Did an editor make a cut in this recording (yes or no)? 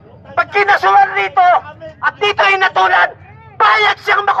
no